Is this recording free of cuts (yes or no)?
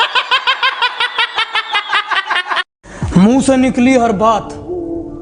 no